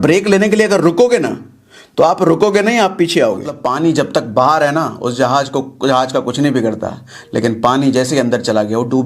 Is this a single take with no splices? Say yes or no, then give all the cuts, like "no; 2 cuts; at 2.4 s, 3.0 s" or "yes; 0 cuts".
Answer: no; 1 cut; at 3.6 s